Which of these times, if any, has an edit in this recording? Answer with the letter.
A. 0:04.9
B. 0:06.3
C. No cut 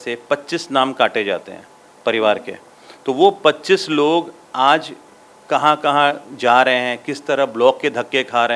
C